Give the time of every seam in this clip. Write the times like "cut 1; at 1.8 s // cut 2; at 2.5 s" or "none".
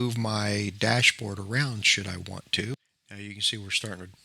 cut 1; at 2.7 s